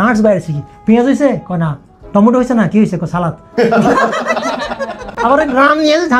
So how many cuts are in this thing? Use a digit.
0